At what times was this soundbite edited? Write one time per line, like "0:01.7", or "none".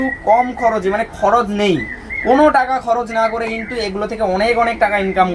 none